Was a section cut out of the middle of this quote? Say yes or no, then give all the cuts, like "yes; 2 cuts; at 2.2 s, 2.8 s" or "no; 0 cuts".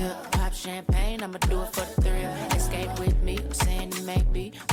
no; 0 cuts